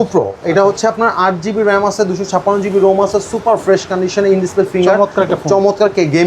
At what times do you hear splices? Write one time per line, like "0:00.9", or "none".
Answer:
none